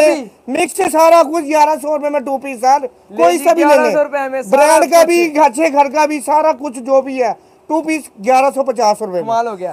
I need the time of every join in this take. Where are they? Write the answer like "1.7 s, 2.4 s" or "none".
none